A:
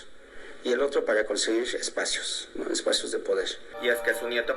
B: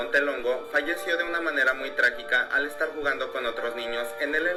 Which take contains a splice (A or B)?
A